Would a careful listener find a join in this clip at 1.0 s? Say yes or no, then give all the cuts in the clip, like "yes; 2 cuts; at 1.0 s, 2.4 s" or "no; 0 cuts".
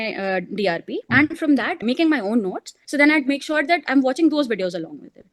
yes; 3 cuts; at 1.0 s, 1.8 s, 2.7 s